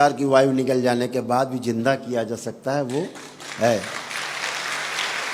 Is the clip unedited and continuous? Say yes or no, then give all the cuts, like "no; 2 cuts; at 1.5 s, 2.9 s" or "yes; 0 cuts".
yes; 0 cuts